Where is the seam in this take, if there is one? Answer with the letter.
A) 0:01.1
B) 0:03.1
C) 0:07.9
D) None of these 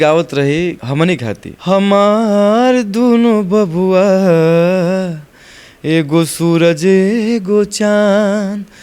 A